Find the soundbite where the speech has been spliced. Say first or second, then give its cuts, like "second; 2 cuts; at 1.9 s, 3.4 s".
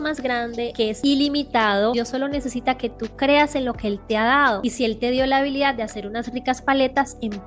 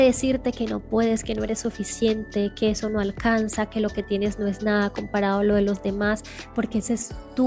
first; 3 cuts; at 0.8 s, 1.9 s, 4.6 s